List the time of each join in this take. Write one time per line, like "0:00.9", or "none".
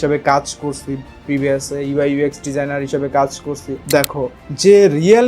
0:03.8